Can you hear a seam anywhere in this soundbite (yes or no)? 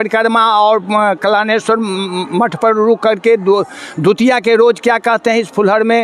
no